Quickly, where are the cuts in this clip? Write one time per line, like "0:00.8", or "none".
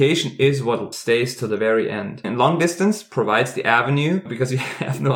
0:00.9
0:02.2